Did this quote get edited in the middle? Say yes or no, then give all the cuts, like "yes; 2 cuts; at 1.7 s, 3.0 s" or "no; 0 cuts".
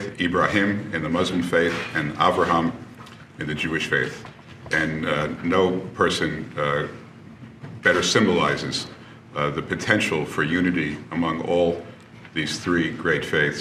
no; 0 cuts